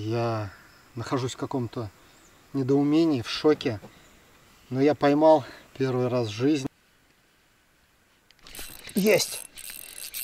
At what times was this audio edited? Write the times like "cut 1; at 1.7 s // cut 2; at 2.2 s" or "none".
cut 1; at 6.6 s